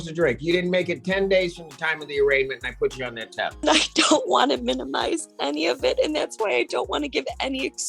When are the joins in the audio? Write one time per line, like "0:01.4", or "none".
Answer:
0:03.6